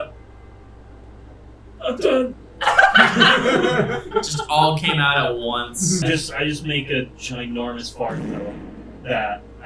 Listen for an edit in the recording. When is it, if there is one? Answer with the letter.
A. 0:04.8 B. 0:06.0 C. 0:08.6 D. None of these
B